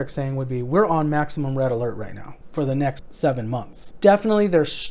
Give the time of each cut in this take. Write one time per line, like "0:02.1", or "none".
0:02.8
0:03.8